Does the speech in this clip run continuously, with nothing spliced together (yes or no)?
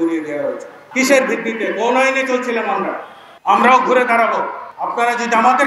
no